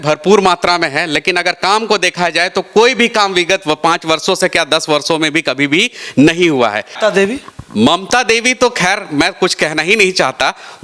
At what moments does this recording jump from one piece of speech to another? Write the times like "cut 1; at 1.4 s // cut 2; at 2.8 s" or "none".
cut 1; at 6.9 s